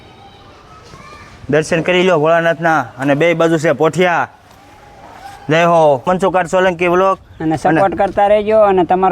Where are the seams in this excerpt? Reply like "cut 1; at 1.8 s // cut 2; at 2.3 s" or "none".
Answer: cut 1; at 6.1 s